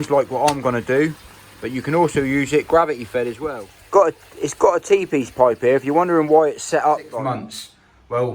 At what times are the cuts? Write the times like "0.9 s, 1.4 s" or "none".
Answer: 3.4 s, 7.1 s